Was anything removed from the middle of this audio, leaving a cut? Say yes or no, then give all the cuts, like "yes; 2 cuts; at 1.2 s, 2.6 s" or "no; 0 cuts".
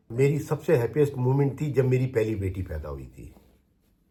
no; 0 cuts